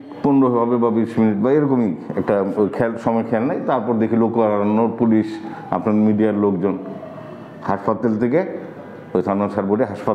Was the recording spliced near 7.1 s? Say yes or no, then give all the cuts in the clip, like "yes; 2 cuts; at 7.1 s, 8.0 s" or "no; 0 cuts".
no; 0 cuts